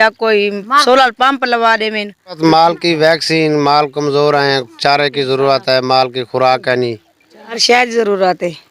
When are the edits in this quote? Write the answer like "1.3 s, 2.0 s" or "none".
2.4 s, 7.4 s